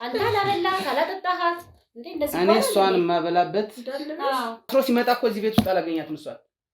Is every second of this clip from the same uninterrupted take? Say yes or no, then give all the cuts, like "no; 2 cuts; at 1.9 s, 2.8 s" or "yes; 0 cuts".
no; 1 cut; at 4.7 s